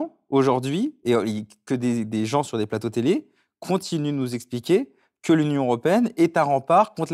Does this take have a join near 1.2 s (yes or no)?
no